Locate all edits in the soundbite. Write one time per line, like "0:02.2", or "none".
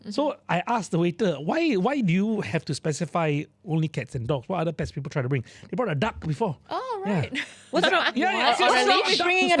none